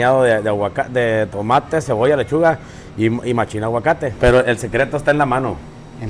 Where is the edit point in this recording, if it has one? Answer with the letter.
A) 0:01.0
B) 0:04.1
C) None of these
B